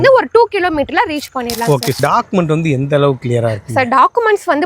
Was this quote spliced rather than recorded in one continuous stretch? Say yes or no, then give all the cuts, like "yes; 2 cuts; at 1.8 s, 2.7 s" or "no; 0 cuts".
yes; 1 cut; at 2.0 s